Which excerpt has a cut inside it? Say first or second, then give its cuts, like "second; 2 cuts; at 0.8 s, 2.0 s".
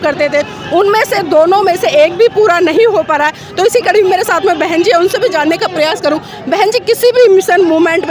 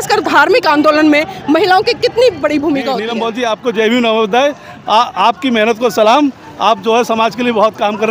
second; 1 cut; at 3.1 s